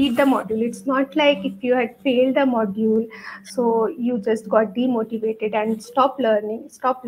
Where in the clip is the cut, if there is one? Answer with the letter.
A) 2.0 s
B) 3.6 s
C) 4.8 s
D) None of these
D